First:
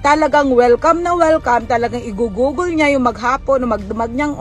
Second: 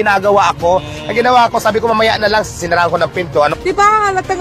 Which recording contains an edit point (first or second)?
second